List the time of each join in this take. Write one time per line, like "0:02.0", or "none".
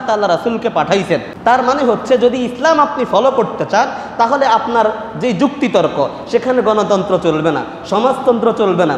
0:01.3